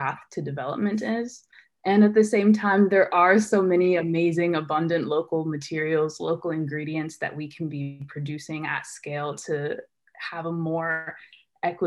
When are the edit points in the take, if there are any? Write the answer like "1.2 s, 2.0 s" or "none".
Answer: none